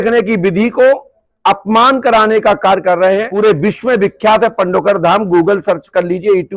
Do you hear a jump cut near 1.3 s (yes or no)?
no